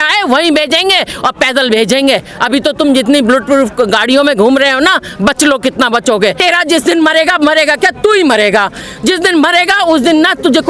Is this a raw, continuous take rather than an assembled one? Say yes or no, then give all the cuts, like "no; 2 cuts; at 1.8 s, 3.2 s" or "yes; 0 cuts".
no; 1 cut; at 6.4 s